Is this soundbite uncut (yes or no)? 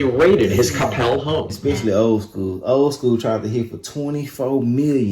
no